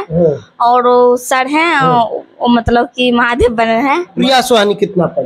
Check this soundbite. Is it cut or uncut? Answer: cut